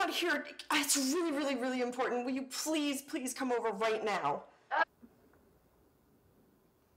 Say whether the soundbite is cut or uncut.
uncut